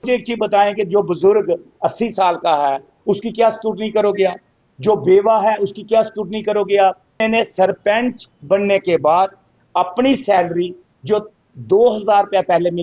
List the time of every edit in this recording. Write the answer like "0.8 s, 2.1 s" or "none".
7.2 s